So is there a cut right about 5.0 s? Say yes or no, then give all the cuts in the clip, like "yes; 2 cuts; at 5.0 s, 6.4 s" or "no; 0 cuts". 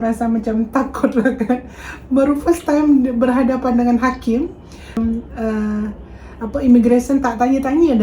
yes; 1 cut; at 5.0 s